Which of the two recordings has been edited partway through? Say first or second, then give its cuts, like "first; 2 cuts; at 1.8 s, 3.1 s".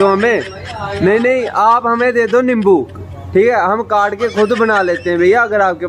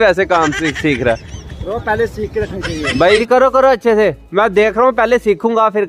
second; 1 cut; at 3.2 s